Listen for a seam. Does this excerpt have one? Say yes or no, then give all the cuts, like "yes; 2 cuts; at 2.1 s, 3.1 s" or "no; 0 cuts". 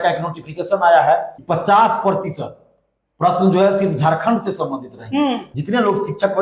yes; 2 cuts; at 1.4 s, 5.4 s